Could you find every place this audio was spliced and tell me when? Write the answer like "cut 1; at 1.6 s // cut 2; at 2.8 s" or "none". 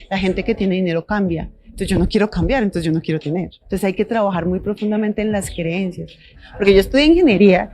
cut 1; at 3.6 s // cut 2; at 6.4 s